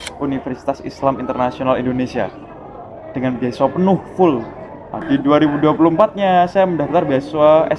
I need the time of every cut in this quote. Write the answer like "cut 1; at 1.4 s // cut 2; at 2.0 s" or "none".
cut 1; at 5.0 s